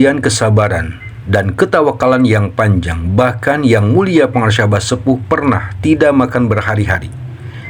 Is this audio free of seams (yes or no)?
yes